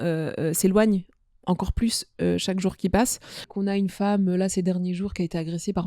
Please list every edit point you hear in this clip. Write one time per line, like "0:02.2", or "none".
0:03.5